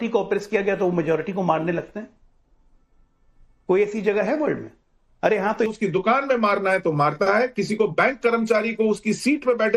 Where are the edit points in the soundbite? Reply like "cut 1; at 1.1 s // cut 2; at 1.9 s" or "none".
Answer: cut 1; at 5.7 s